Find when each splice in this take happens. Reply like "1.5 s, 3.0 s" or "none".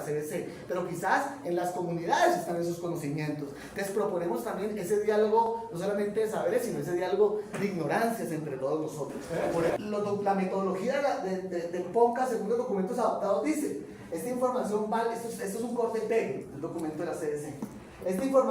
9.5 s